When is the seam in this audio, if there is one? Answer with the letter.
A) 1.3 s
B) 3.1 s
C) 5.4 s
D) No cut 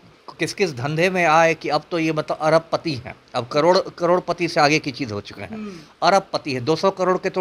D